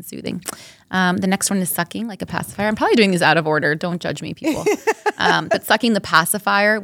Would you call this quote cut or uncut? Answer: uncut